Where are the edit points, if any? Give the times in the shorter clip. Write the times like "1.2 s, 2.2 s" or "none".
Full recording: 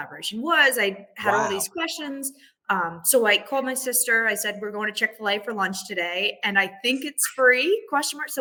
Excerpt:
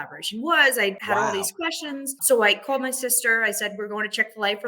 1.0 s, 2.2 s